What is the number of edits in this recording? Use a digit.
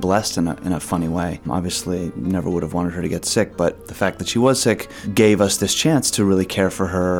3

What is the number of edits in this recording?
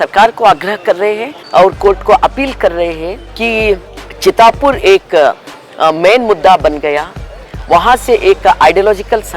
0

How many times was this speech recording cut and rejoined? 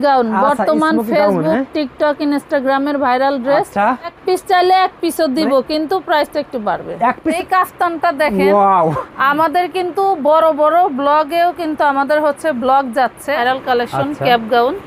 3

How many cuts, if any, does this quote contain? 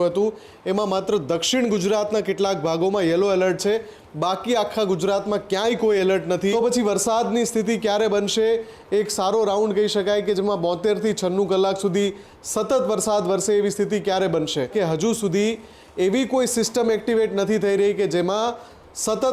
2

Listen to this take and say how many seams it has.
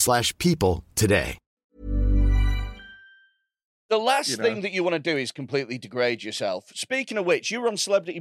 1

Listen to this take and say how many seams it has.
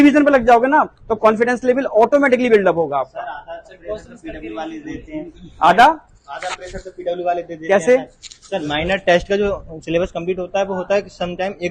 0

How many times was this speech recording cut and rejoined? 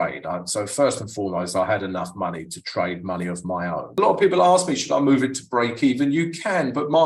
1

